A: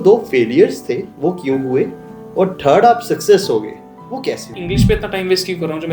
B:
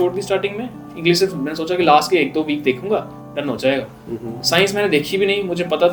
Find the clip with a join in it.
A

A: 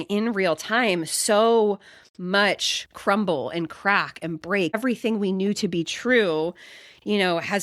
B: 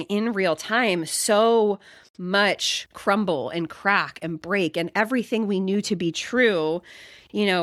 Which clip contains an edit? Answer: A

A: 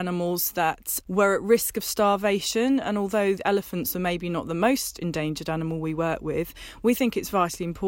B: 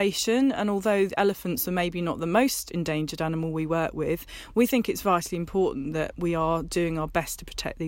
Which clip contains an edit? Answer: A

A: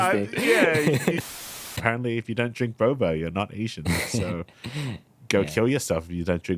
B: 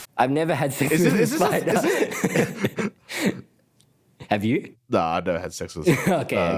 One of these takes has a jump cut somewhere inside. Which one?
A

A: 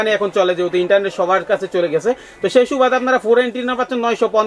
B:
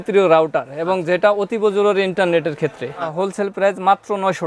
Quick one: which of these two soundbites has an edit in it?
B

